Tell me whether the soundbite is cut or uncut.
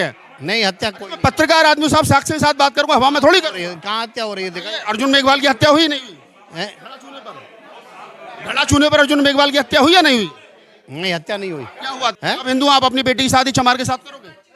cut